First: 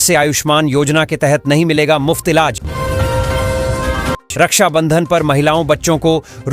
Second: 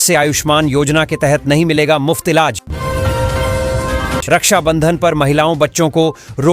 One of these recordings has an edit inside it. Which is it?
second; 2 cuts; at 2.7 s, 4.2 s

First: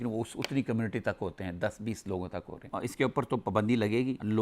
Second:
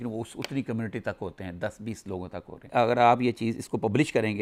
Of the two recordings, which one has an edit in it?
first; 1 cut; at 2.7 s

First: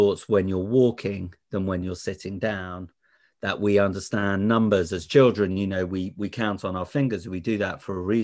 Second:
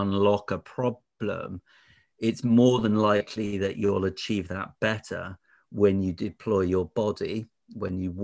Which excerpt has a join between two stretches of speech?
first; 1 cut; at 3.2 s

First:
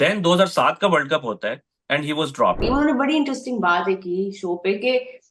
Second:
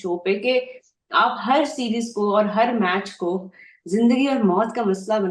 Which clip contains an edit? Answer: first; 1 cut; at 2.6 s

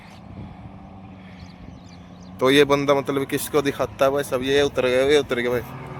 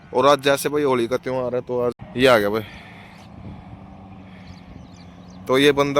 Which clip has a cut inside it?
second; 1 cut; at 2.0 s

